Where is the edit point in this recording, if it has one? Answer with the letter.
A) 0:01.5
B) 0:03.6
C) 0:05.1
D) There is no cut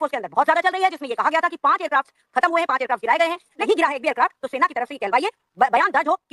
B